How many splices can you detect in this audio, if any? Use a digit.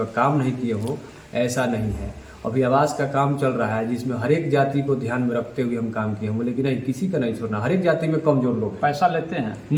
0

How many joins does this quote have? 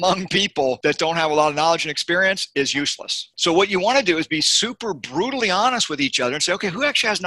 2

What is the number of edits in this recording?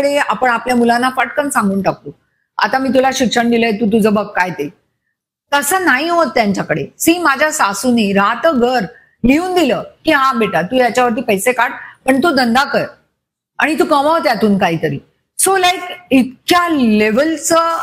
0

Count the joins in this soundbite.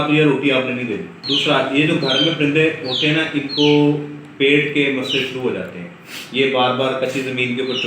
1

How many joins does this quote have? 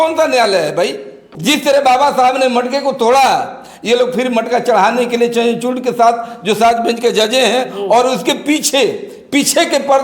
1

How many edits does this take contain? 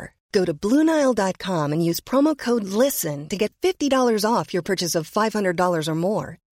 0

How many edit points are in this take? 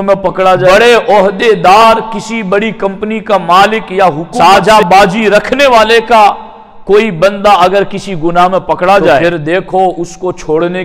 3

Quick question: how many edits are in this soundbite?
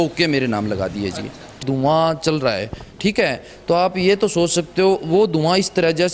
1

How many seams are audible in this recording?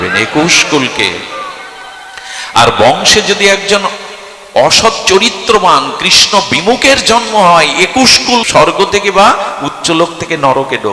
1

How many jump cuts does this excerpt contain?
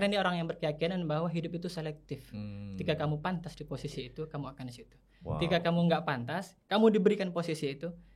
0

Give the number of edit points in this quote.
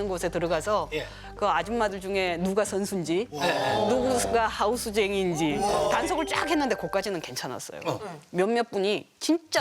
1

